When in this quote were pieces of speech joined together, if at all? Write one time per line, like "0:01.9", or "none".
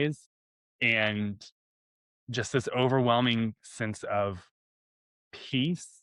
none

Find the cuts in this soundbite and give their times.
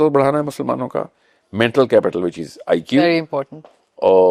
none

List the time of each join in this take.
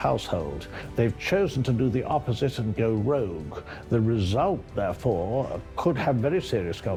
none

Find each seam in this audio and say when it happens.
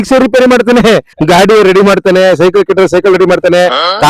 0:01.1

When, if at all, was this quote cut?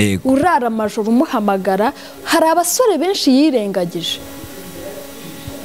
none

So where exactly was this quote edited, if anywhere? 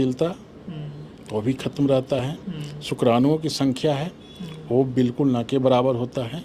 none

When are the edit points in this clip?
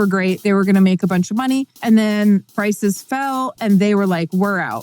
0:01.7
0:02.5

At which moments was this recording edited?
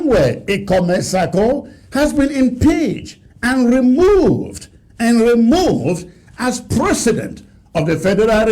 none

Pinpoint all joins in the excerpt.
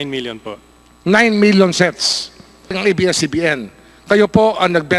0:02.7

